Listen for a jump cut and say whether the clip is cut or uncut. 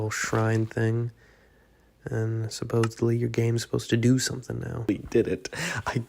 cut